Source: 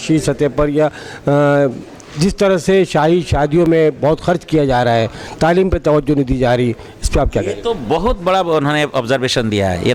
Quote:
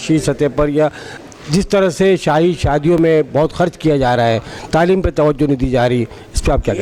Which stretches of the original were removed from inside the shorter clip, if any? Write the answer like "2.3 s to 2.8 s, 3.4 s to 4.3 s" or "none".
1.1 s to 1.8 s